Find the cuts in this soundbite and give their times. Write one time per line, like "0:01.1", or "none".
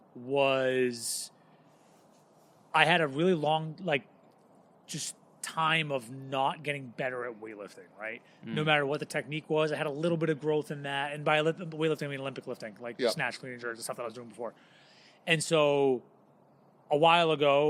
none